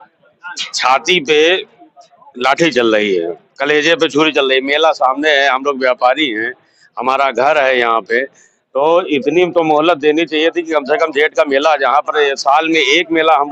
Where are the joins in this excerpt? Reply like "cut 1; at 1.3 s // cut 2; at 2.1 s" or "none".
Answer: none